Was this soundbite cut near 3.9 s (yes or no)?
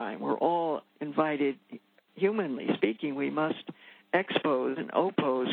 no